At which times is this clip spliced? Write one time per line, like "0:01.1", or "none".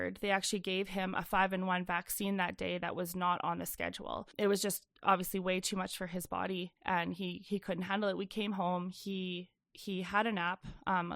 0:04.3